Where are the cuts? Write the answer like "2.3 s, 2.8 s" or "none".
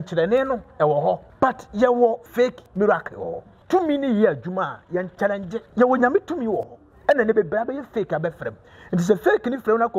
1.3 s, 2.3 s, 3.5 s, 5.6 s